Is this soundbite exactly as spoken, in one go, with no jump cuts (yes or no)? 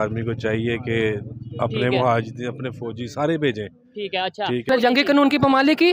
no